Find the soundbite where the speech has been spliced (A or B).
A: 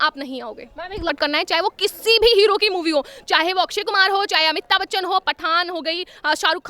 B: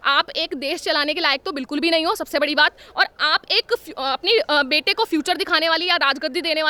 A